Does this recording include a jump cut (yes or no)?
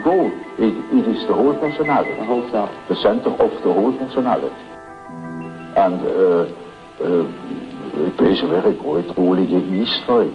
yes